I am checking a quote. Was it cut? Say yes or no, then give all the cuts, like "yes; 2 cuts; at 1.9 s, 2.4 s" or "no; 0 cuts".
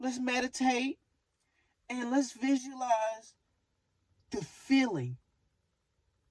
no; 0 cuts